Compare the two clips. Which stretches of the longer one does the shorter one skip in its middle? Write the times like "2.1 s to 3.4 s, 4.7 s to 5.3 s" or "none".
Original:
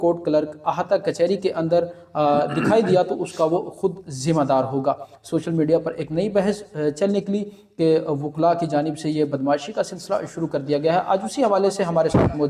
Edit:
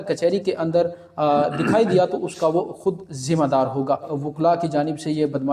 5.1 s to 8.2 s